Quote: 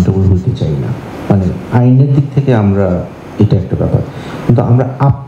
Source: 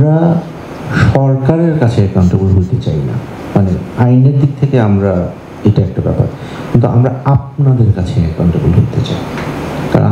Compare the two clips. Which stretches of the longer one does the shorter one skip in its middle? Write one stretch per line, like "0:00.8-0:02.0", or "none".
none